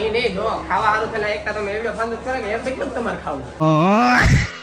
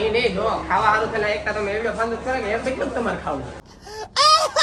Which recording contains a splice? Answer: first; 1 cut; at 3.6 s

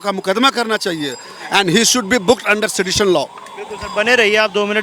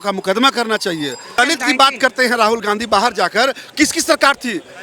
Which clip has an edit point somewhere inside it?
second; 1 cut; at 1.3 s

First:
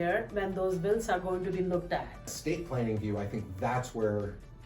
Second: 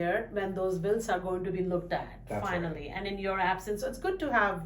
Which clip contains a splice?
first; 1 cut; at 2.3 s

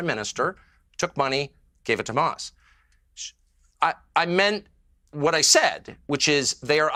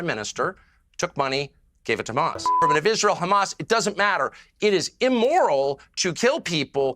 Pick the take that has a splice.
second; 1 cut; at 2.6 s

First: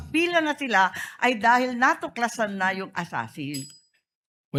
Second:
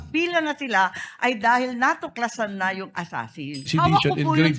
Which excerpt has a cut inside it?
second; 1 cut; at 3.6 s

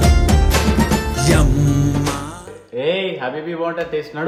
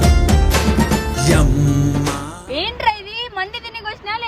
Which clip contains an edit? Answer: second; 1 cut; at 2.4 s

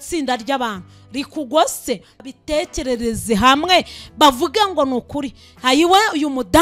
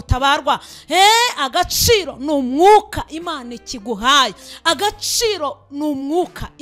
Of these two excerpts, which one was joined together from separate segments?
first; 1 cut; at 2.1 s

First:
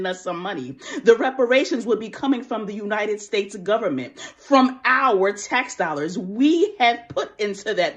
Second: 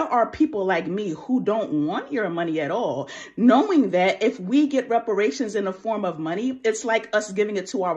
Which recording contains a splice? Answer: second; 2 cuts; at 1.1 s, 6.0 s

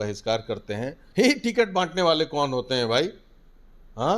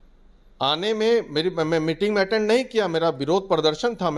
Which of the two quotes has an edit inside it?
first; 1 cut; at 1.0 s

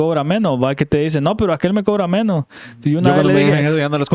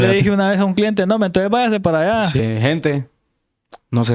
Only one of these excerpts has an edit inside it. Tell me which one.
second; 1 cut; at 2.4 s

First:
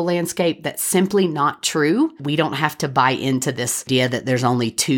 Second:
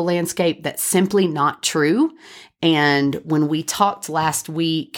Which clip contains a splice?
first; 2 cuts; at 2.2 s, 3.8 s

